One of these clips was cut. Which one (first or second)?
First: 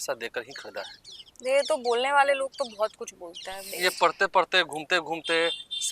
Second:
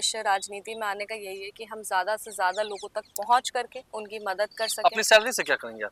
first